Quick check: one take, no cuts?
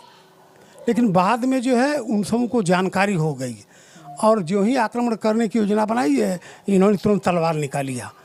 yes; 0 cuts

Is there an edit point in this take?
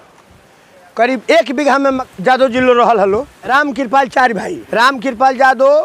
yes; 3 cuts; at 2.1 s, 3.4 s, 4.6 s

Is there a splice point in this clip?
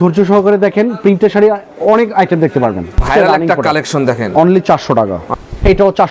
yes; 2 cuts; at 3.0 s, 5.2 s

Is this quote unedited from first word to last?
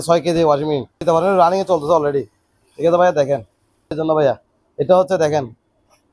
no; 2 cuts; at 1.0 s, 3.9 s

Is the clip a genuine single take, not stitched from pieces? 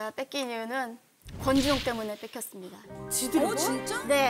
yes; 0 cuts

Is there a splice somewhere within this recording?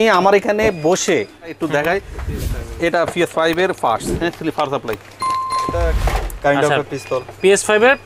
yes; 1 cut; at 1.6 s

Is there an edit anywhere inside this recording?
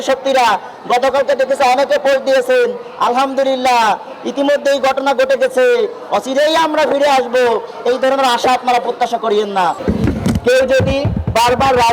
yes; 1 cut; at 9.8 s

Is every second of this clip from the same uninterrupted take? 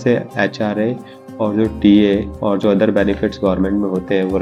yes; 0 cuts

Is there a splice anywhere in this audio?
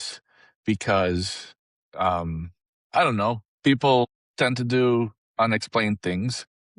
yes; 1 cut; at 5.2 s

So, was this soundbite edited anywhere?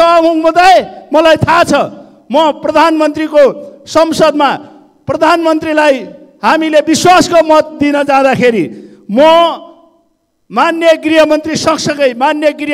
no; 0 cuts

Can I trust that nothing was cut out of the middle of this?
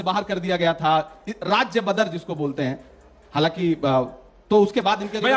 yes; 0 cuts

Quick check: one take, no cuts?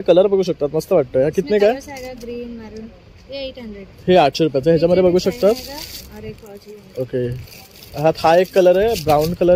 yes; 0 cuts

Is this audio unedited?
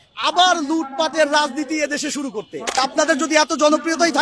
no; 1 cut; at 2.8 s

